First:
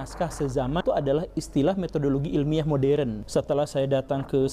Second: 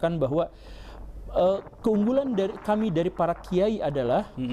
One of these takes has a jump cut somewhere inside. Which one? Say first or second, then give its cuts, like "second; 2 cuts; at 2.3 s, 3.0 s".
first; 2 cuts; at 0.8 s, 3.2 s